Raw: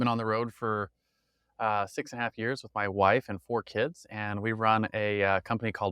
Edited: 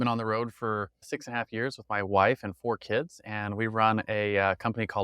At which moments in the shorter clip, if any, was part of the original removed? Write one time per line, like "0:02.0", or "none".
0:01.1